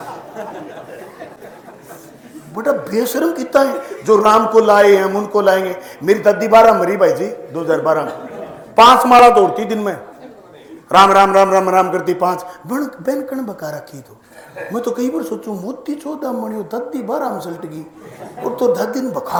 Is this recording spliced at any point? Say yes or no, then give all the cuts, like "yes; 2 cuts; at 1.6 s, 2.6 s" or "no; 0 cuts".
no; 0 cuts